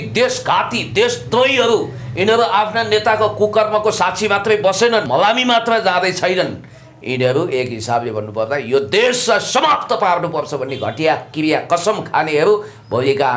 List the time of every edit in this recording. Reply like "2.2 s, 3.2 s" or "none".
5.1 s